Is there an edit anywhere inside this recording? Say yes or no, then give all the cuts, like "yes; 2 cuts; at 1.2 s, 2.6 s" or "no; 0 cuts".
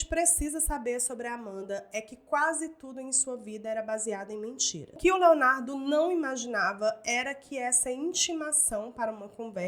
yes; 1 cut; at 4.8 s